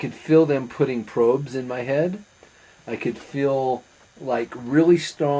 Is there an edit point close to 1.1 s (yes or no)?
no